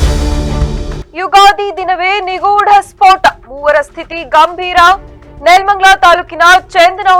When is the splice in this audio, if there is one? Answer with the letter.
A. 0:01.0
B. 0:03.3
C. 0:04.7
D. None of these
D